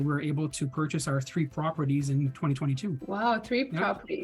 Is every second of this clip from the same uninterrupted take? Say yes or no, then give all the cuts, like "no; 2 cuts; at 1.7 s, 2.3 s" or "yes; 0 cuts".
no; 1 cut; at 3.0 s